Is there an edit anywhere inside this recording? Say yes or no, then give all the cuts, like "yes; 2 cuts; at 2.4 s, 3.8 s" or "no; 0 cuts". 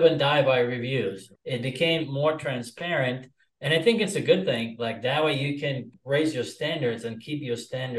yes; 2 cuts; at 1.3 s, 5.9 s